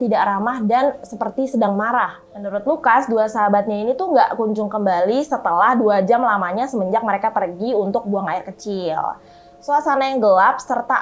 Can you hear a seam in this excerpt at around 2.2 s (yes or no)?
yes